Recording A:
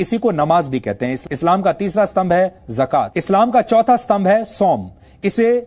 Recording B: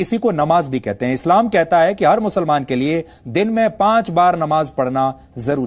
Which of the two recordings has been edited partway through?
A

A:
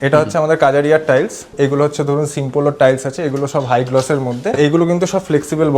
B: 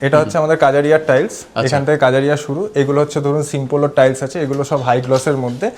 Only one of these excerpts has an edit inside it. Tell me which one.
A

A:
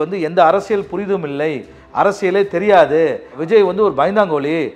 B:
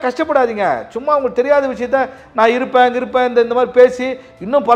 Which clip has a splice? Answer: A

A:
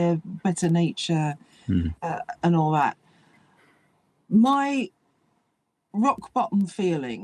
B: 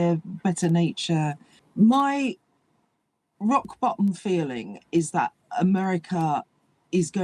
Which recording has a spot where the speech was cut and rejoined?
B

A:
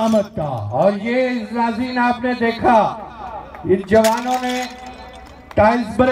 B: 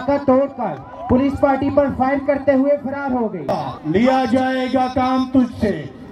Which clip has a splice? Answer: B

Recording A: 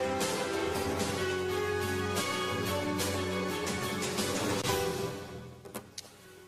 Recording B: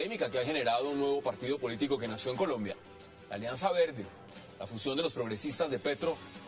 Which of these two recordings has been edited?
A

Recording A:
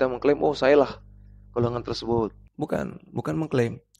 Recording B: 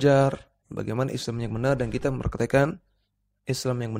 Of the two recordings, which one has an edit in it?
A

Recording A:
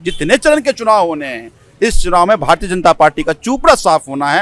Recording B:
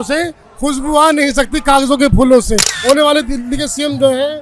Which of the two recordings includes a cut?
B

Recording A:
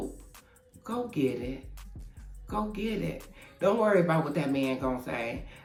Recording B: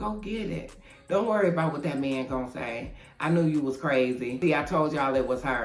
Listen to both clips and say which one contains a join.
B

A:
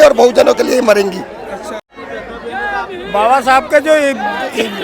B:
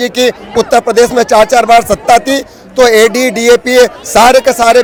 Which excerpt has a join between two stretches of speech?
A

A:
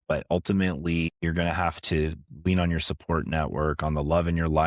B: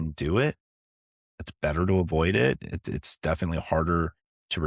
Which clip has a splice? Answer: A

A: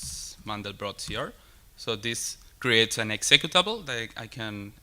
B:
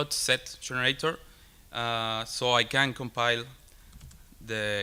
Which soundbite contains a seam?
A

